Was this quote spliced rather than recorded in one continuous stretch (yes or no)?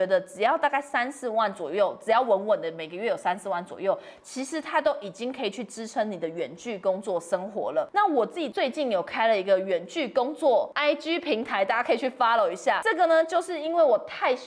yes